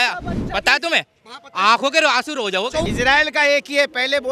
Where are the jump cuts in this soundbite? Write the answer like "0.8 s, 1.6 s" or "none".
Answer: 2.8 s